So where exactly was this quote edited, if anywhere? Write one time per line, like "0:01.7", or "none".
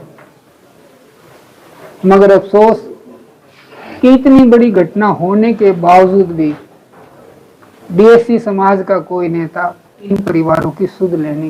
none